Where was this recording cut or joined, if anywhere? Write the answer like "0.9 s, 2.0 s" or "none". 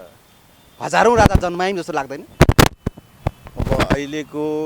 none

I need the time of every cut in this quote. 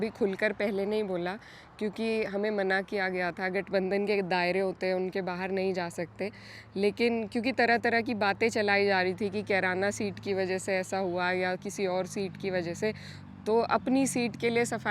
none

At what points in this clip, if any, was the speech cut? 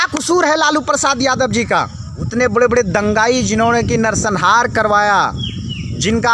2.3 s

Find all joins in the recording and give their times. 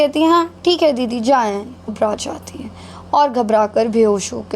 1.9 s

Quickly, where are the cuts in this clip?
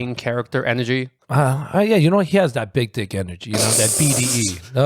1.2 s

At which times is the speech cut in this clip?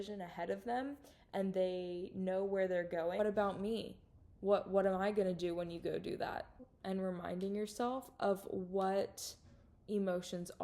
3.2 s, 6.7 s

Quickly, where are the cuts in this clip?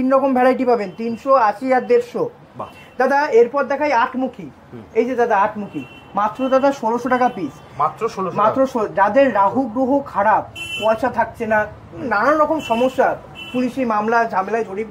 none

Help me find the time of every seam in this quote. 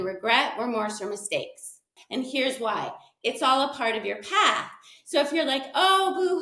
1.9 s

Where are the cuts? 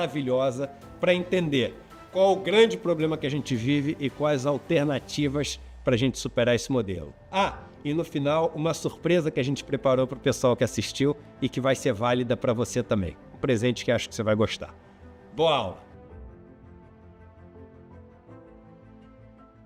none

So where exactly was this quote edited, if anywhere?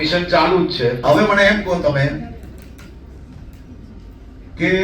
1.0 s

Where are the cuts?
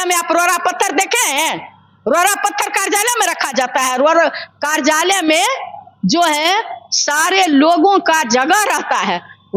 none

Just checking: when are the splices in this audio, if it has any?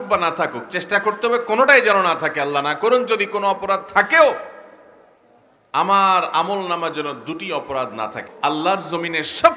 8.2 s

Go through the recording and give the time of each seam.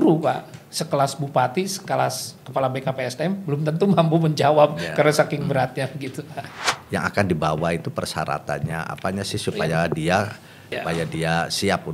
6.5 s, 10.7 s

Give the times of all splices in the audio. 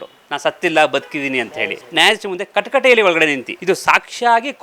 3.5 s

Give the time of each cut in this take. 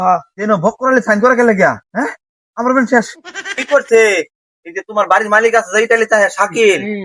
1.9 s, 3.6 s

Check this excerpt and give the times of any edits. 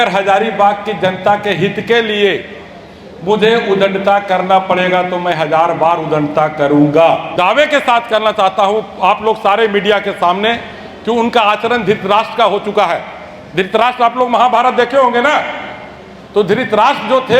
7.3 s

